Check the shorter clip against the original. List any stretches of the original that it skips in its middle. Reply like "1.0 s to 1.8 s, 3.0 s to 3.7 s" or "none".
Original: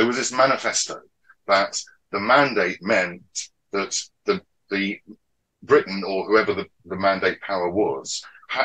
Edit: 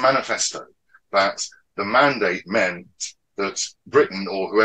4.0 s to 5.5 s